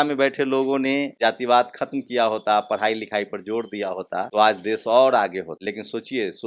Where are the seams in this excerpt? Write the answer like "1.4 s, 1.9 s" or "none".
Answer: 1.1 s, 4.3 s, 5.5 s

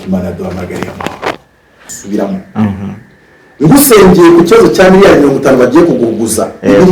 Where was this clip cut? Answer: 1.9 s

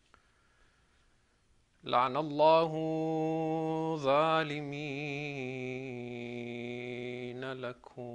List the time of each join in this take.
2.9 s

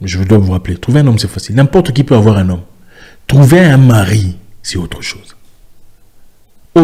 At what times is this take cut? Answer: none

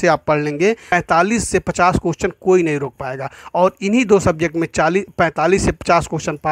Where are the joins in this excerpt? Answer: 0.9 s

